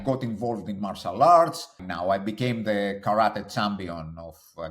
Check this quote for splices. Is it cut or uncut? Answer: cut